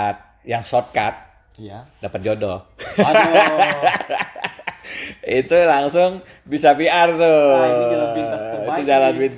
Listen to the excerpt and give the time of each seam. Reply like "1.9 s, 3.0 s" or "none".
none